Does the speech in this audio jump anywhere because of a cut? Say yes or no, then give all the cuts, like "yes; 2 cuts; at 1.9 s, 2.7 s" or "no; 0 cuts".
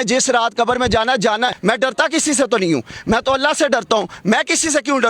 yes; 1 cut; at 1.6 s